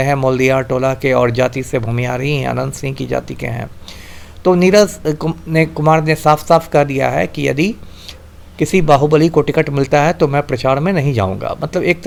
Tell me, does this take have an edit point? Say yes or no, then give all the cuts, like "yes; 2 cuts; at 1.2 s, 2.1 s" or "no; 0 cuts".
no; 0 cuts